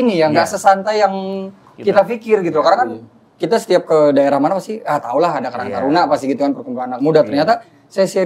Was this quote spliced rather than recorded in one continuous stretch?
no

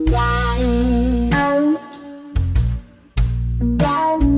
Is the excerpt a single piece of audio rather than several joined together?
yes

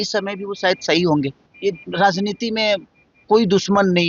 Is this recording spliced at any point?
yes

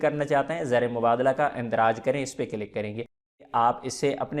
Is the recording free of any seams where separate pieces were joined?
no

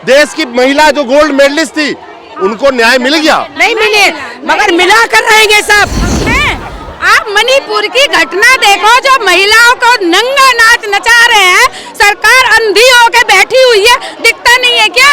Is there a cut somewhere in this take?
yes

